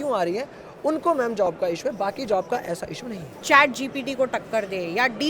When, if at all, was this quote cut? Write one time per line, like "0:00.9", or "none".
0:03.3